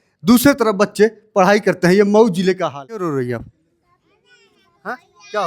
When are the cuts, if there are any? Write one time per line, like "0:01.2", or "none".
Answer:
0:03.0